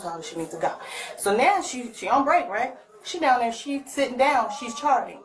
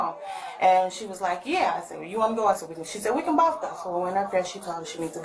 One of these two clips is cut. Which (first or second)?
first